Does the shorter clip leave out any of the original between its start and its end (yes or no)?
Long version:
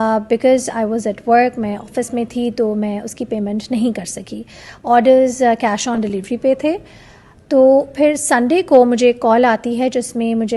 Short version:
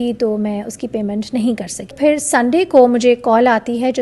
yes